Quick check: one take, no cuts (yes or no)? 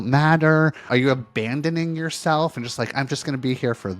yes